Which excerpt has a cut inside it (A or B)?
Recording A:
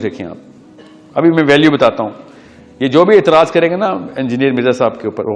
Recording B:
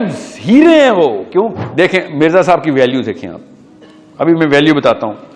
B